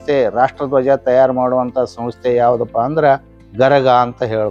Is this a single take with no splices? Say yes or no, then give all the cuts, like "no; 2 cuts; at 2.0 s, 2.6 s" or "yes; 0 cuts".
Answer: yes; 0 cuts